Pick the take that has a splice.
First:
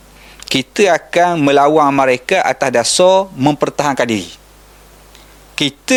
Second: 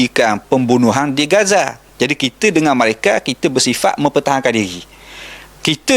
second; 1 cut; at 1.8 s

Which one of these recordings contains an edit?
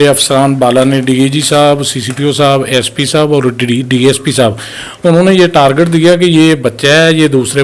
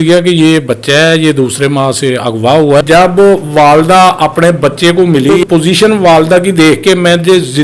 second; 2 cuts; at 2.8 s, 5.4 s

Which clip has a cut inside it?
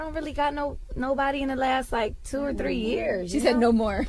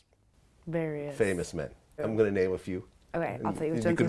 second; 1 cut; at 2.0 s

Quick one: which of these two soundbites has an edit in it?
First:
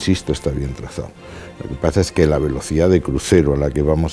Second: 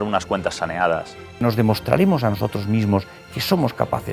second; 1 cut; at 1.4 s

